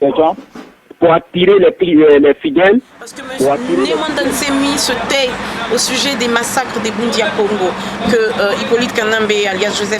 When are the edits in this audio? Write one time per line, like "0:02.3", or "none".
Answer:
0:04.0